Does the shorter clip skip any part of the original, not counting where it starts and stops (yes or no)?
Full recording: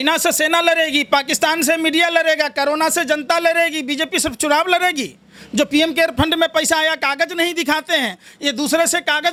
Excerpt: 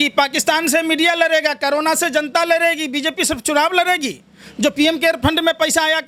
no